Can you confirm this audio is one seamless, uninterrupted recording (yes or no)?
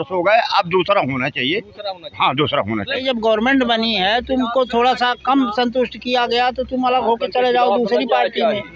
no